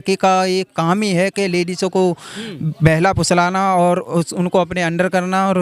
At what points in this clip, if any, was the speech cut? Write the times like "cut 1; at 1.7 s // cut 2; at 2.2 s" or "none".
none